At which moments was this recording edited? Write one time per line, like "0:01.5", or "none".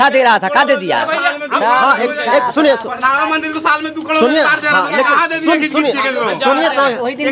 none